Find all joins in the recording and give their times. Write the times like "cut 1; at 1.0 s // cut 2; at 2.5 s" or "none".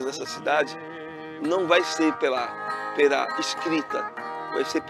none